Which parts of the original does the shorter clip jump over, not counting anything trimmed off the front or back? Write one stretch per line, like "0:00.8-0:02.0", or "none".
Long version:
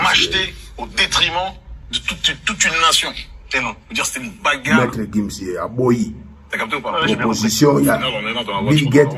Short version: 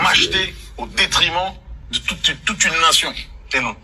none